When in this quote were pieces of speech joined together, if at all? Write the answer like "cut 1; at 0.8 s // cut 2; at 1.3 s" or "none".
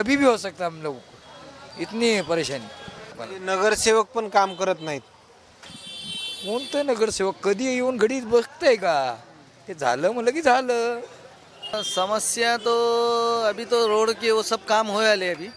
cut 1; at 3.1 s // cut 2; at 11.7 s